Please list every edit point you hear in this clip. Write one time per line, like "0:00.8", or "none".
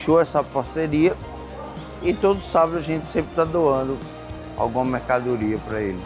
none